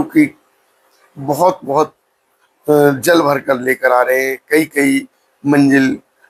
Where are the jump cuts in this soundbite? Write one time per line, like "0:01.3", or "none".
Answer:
none